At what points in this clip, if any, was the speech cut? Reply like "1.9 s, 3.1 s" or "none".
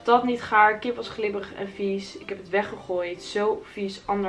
none

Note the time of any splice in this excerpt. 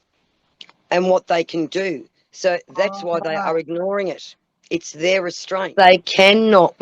5.7 s

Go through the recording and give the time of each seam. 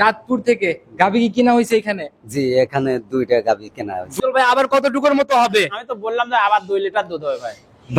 4.1 s

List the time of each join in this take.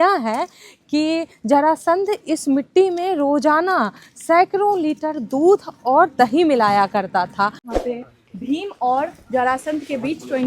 7.7 s

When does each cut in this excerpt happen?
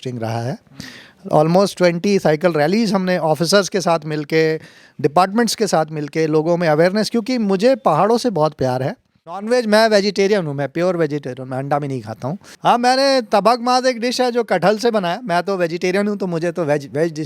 9.5 s, 12.5 s

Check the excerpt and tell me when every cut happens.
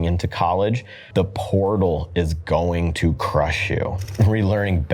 0.9 s, 4.0 s

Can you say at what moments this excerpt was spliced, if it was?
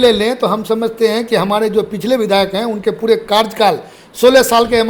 none

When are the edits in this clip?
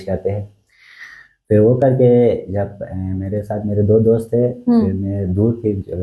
none

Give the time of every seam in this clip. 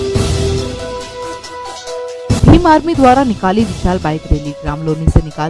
1.1 s

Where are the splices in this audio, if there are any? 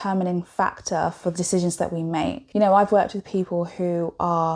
2.4 s

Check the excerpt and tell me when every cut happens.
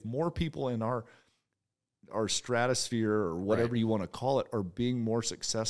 none

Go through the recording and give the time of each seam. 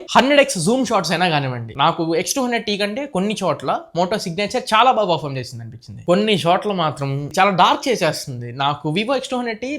6.0 s

